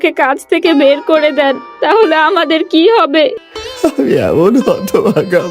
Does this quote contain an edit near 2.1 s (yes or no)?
no